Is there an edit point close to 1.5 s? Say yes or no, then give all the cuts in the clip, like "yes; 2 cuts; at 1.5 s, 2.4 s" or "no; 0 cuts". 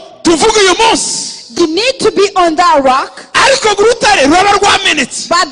yes; 1 cut; at 1.5 s